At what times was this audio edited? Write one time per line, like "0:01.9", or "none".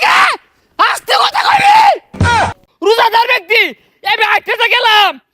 0:02.4